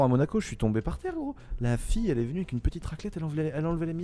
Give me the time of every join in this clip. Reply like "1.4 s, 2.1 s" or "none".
none